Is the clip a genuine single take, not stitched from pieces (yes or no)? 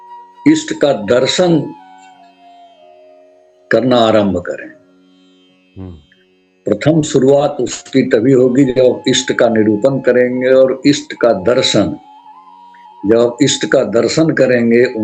yes